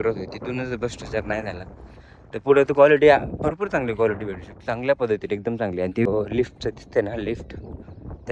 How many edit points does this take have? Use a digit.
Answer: 1